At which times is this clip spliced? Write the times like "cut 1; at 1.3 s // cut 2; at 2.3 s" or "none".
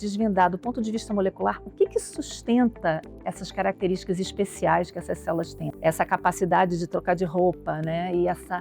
cut 1; at 5.6 s